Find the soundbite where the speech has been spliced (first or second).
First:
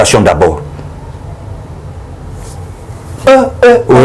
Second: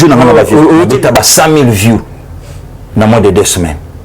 second